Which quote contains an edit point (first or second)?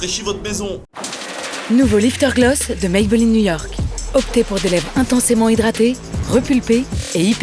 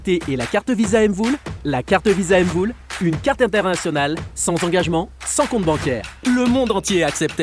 first